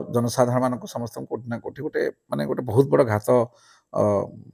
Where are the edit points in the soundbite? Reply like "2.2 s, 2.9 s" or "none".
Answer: none

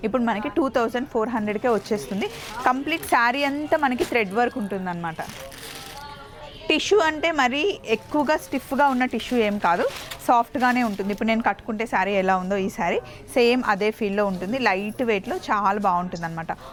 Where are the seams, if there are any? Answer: none

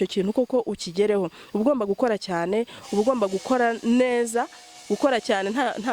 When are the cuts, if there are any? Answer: none

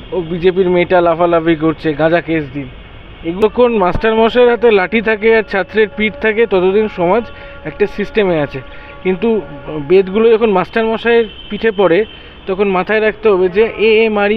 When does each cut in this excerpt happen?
3.4 s

